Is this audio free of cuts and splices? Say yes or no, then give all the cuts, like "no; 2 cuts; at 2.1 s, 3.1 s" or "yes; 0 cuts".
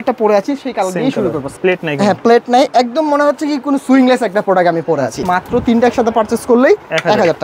no; 2 cuts; at 1.5 s, 5.2 s